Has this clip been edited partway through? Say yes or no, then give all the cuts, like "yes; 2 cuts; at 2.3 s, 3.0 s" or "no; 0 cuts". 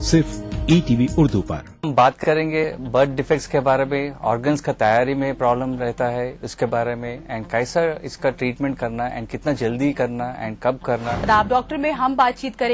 yes; 1 cut; at 1.6 s